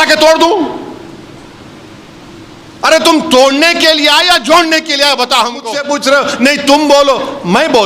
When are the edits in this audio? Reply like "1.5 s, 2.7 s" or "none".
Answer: 5.8 s